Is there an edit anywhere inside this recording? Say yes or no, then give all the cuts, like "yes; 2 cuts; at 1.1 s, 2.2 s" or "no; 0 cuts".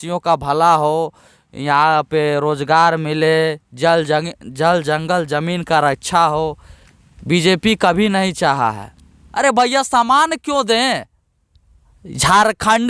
yes; 1 cut; at 9.2 s